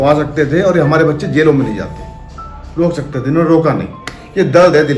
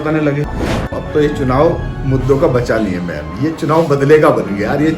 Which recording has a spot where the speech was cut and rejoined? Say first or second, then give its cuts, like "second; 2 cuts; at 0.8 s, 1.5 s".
second; 1 cut; at 0.9 s